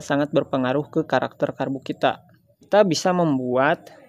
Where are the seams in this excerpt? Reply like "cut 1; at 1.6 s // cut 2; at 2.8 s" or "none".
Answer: cut 1; at 2.7 s